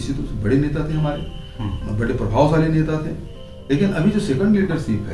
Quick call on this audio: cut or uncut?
uncut